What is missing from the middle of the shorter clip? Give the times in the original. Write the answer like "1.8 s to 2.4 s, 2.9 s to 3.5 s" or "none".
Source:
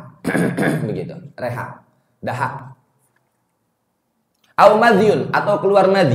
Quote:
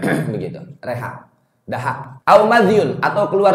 2.7 s to 4.4 s